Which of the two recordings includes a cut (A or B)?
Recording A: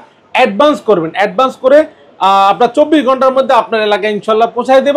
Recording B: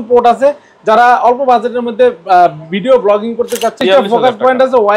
B